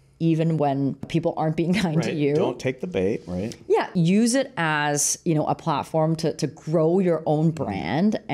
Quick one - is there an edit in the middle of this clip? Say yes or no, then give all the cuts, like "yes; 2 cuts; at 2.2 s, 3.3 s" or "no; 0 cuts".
yes; 2 cuts; at 1.1 s, 3.9 s